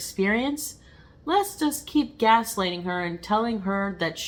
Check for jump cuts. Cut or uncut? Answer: uncut